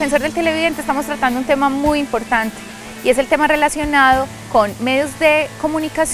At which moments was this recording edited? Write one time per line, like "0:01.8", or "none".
none